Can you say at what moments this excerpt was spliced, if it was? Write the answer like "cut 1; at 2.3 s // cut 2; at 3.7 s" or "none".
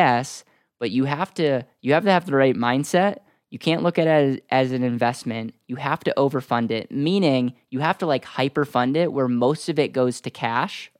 none